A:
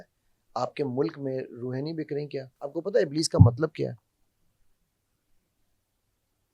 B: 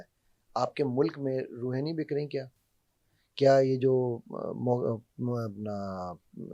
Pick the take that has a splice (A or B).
A